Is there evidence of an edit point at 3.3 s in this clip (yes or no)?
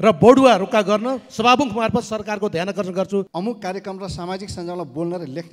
yes